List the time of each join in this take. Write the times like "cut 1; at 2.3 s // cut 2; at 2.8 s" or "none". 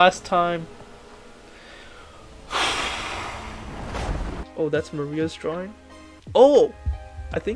cut 1; at 4.4 s